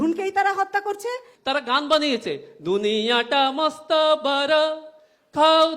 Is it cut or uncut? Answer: cut